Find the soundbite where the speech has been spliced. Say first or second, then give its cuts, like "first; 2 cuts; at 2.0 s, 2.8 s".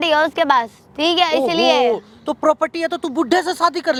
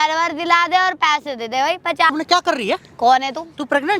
second; 1 cut; at 2.1 s